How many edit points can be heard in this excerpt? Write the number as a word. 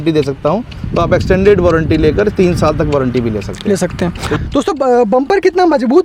one